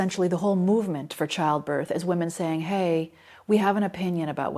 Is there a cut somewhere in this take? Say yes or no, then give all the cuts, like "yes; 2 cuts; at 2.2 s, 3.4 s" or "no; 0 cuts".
no; 0 cuts